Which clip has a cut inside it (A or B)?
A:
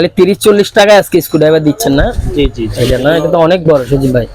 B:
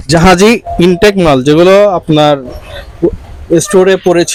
A